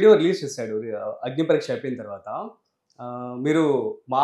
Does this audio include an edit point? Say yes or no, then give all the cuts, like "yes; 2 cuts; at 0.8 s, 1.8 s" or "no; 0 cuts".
no; 0 cuts